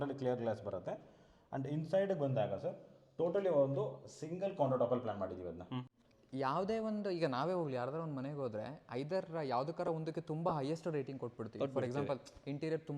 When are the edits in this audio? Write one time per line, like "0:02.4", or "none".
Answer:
0:05.9